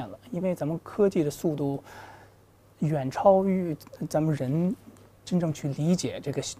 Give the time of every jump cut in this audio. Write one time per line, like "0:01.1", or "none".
none